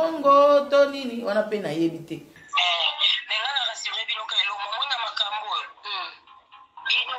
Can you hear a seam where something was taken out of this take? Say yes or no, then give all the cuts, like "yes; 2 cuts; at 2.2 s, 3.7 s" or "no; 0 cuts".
yes; 1 cut; at 2.3 s